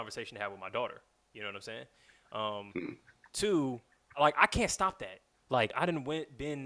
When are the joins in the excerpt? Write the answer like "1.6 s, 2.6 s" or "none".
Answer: 4.1 s, 5.7 s